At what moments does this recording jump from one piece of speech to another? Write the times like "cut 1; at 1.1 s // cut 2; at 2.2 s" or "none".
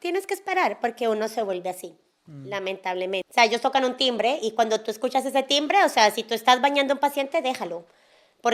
cut 1; at 3.3 s